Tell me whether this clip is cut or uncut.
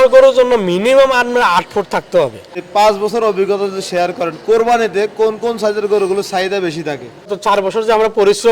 cut